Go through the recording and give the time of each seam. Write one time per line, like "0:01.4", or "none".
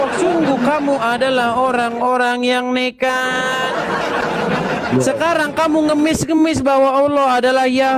none